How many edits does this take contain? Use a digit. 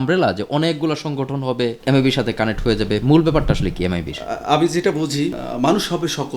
2